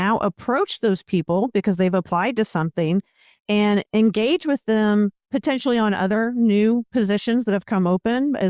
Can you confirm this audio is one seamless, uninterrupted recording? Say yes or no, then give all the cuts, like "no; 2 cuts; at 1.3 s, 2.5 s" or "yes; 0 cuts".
yes; 0 cuts